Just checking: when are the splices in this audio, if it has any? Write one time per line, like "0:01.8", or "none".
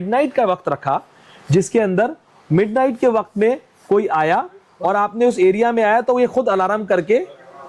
none